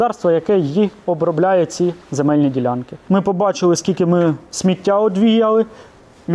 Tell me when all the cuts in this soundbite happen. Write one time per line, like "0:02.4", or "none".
0:03.0